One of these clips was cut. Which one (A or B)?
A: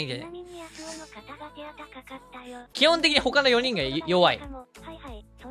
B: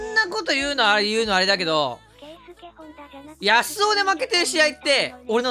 A